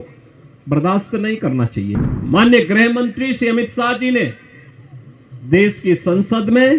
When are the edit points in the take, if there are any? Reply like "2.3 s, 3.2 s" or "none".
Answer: 1.9 s